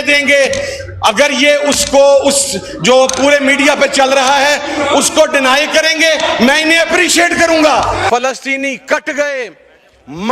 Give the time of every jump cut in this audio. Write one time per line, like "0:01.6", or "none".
0:08.0